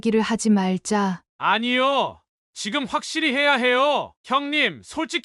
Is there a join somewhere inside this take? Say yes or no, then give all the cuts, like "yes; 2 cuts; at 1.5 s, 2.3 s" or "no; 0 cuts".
yes; 1 cut; at 4.1 s